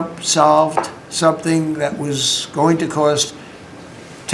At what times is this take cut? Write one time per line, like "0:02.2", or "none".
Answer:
none